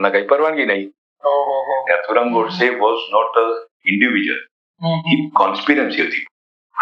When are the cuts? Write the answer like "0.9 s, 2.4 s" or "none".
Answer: 1.8 s